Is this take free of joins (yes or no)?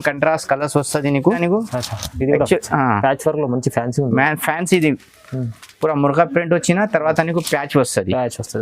no